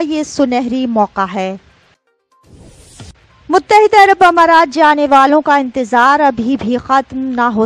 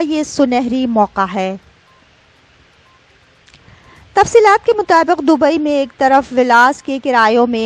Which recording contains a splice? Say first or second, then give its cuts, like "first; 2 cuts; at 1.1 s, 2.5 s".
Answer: first; 1 cut; at 2.0 s